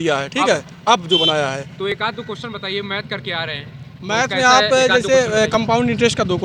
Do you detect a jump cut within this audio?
no; 0 cuts

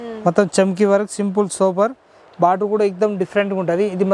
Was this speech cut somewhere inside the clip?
no; 0 cuts

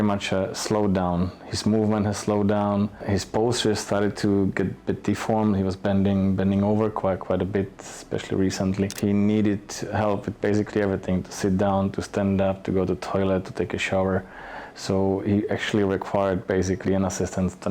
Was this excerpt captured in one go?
no; 2 cuts; at 3.0 s, 8.9 s

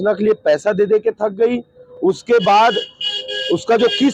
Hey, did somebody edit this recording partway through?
no; 0 cuts

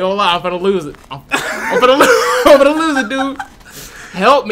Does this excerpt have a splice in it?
no; 0 cuts

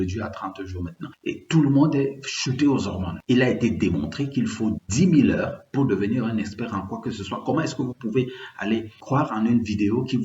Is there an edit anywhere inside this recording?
yes; 3 cuts; at 1.1 s, 3.1 s, 9.0 s

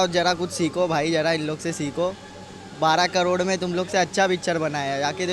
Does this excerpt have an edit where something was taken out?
no; 0 cuts

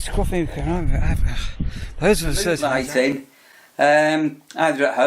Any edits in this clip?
yes; 1 cut; at 2.6 s

